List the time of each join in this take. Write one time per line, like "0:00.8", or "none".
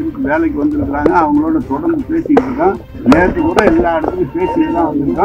0:02.9

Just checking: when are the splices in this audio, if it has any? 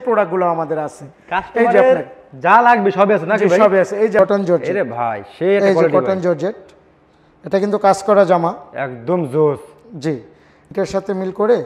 0:04.2
0:10.7

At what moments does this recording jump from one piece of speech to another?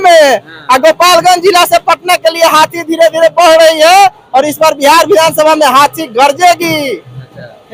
none

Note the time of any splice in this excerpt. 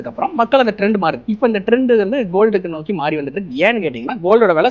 0:01.2

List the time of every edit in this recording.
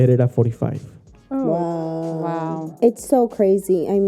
0:02.7

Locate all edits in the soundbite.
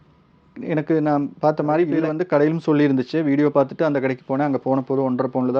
none

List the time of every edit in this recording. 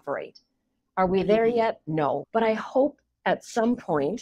0:02.2

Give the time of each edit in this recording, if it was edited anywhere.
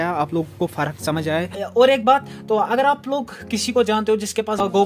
0:01.6

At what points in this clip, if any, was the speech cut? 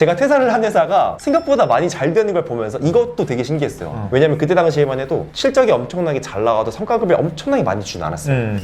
0:04.0

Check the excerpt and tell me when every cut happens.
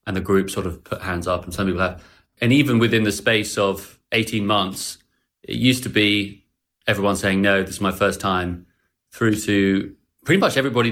0:02.3

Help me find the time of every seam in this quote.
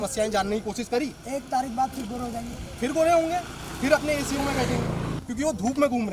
0:05.2

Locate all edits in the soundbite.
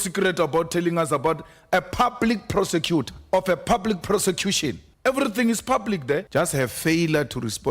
0:03.2
0:04.9
0:06.3

